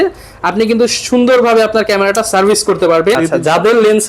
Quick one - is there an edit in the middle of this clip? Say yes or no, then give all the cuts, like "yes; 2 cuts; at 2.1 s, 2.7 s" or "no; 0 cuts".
yes; 1 cut; at 3.2 s